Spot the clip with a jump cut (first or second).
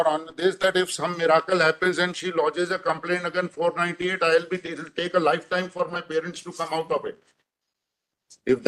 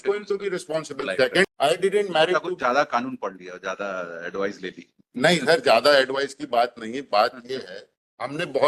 second